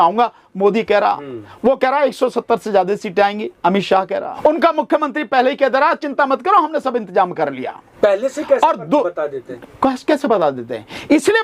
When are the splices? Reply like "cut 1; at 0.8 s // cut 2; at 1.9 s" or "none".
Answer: cut 1; at 4.3 s // cut 2; at 7.9 s